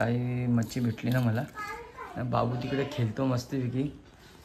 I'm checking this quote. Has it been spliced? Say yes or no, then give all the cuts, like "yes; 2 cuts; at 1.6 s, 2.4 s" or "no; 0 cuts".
no; 0 cuts